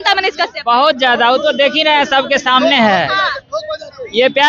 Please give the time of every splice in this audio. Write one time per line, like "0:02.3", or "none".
none